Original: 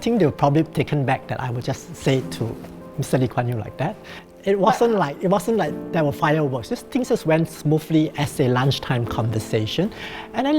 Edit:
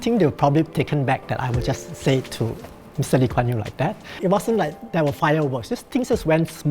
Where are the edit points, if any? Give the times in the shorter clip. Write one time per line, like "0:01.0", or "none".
0:04.1